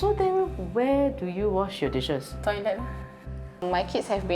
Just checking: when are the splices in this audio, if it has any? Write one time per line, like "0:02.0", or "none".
0:03.0